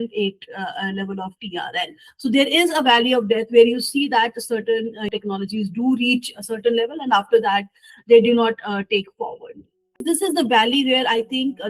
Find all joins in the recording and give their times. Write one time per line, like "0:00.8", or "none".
0:05.1
0:09.9